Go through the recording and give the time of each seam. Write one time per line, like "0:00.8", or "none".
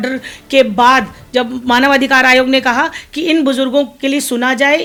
none